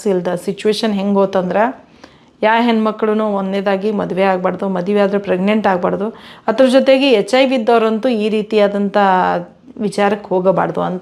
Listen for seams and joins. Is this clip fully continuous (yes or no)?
yes